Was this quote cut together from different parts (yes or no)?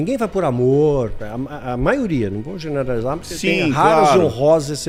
no